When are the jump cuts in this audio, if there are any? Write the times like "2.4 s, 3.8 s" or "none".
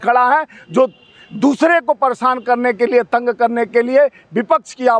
none